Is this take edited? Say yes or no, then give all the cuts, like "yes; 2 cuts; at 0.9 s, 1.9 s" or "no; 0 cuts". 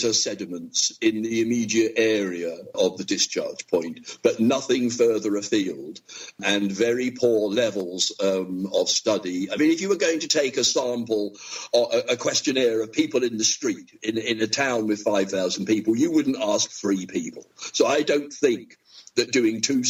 no; 0 cuts